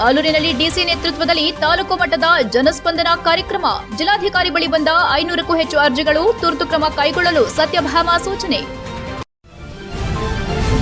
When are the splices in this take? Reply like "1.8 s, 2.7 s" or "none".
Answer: 9.2 s